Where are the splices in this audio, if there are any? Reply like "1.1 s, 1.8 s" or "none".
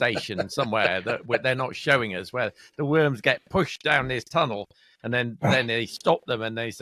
none